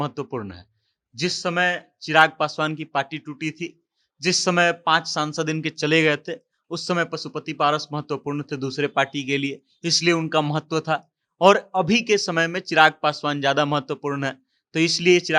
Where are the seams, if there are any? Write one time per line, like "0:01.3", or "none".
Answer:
none